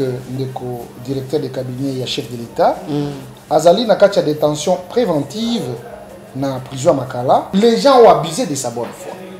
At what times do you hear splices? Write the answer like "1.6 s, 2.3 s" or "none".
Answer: 7.5 s